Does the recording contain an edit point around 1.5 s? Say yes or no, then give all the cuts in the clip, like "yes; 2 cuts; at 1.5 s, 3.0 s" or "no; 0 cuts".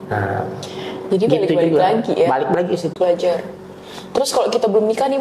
no; 1 cut; at 3.0 s